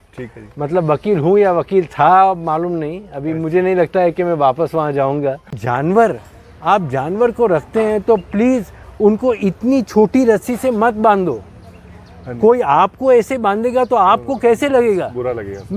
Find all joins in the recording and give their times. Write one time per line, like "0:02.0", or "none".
0:05.6